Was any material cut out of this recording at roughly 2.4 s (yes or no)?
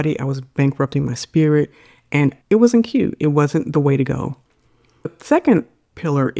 no